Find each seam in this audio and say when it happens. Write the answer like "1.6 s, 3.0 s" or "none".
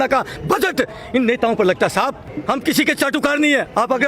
2.3 s